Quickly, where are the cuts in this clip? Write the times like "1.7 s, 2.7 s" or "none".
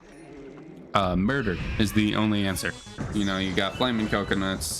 2.9 s